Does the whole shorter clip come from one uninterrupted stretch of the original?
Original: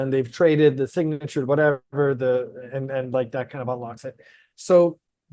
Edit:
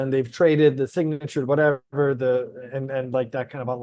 yes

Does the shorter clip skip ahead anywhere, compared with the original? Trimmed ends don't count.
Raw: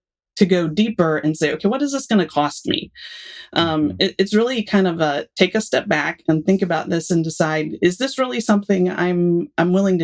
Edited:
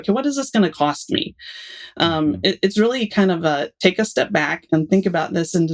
no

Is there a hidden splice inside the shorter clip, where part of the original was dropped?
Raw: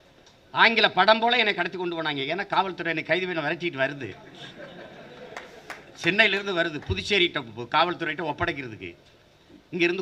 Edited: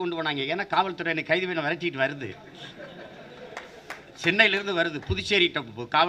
no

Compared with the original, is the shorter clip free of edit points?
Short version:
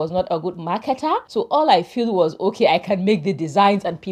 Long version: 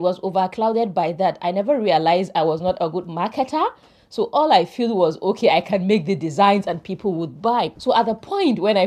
no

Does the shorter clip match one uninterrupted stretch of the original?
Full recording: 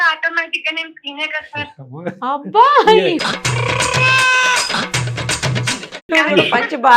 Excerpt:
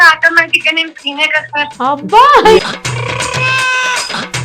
no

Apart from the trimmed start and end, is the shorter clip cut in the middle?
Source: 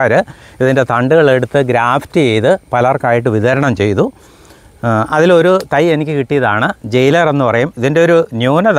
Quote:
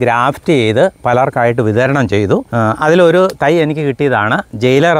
yes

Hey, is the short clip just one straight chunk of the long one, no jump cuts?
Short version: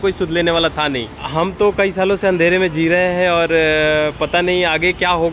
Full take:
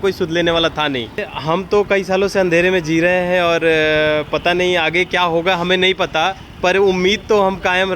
no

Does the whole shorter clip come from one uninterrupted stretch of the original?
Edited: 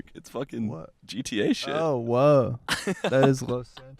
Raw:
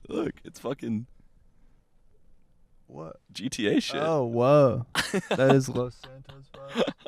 no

